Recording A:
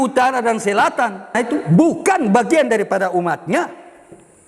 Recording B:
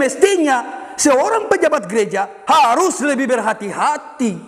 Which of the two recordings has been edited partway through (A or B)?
A